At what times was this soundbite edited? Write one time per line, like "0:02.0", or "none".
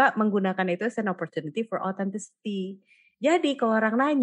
none